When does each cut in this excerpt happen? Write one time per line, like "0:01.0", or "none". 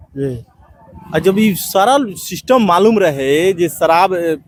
none